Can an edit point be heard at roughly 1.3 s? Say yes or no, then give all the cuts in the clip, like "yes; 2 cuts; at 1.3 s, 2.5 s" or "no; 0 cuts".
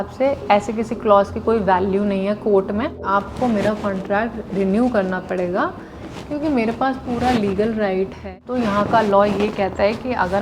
no; 2 cuts; at 3.0 s, 8.3 s